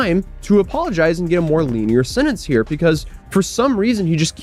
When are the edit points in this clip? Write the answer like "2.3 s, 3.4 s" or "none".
none